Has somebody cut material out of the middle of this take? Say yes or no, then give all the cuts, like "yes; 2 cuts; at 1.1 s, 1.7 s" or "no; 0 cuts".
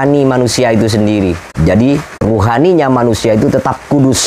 yes; 2 cuts; at 1.5 s, 2.1 s